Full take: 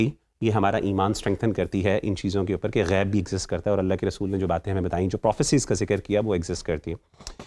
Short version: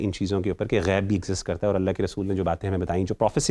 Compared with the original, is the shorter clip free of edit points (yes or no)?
yes